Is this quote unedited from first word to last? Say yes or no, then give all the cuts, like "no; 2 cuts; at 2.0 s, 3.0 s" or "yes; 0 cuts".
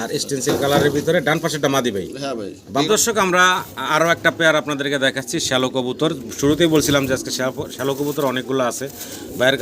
no; 1 cut; at 2.9 s